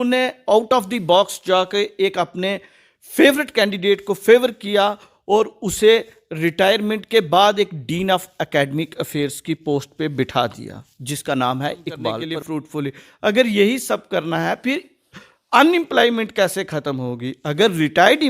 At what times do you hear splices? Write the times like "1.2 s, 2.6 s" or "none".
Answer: 12.7 s